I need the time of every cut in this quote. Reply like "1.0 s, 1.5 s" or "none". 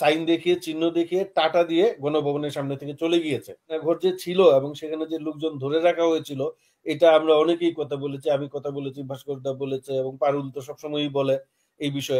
3.8 s